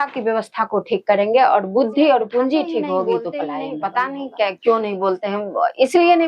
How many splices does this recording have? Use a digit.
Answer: 1